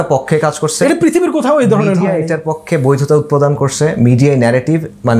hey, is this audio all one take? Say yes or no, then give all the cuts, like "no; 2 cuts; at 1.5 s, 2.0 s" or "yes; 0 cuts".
yes; 0 cuts